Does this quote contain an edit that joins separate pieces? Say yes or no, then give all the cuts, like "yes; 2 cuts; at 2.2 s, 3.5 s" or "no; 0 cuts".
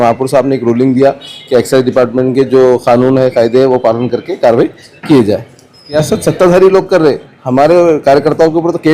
yes; 1 cut; at 6.0 s